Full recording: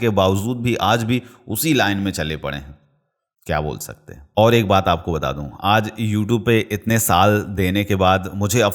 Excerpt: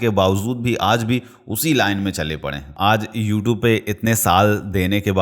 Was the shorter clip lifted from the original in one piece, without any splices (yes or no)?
no